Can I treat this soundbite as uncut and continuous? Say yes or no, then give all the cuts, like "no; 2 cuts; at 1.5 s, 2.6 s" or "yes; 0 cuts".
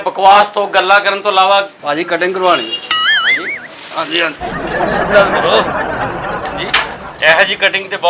no; 2 cuts; at 1.7 s, 7.1 s